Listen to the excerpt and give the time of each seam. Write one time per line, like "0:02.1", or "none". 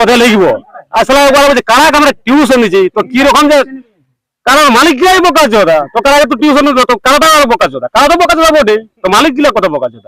none